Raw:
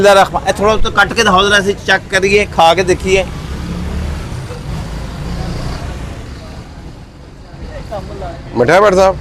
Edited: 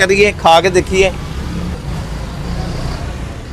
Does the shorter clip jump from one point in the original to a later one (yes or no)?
yes